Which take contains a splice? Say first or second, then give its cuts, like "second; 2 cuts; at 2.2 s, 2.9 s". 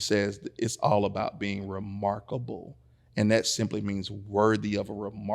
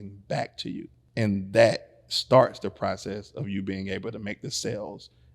second; 1 cut; at 1.0 s